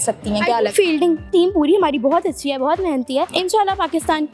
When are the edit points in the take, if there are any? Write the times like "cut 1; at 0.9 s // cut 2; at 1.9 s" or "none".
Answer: cut 1; at 1.3 s // cut 2; at 3.3 s